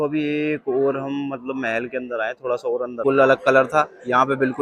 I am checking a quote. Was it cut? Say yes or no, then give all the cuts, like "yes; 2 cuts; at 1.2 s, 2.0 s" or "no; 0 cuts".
yes; 1 cut; at 3.0 s